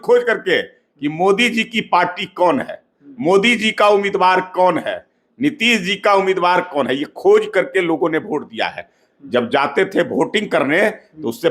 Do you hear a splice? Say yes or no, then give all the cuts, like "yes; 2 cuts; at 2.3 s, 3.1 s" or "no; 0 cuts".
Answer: no; 0 cuts